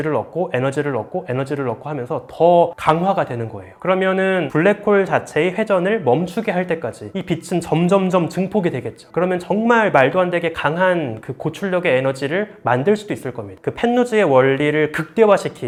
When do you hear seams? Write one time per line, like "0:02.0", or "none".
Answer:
none